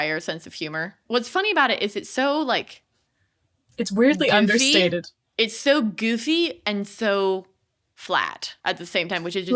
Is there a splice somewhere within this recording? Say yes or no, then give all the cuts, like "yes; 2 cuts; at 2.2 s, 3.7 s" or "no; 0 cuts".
yes; 2 cuts; at 1.0 s, 8.4 s